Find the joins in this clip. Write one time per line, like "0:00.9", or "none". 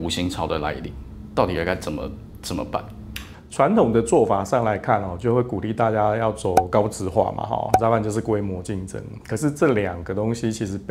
none